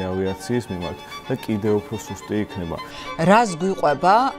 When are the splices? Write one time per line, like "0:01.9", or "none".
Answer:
0:02.9